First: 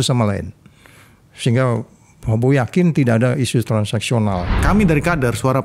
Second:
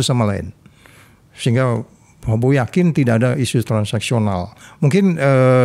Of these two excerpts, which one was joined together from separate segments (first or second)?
first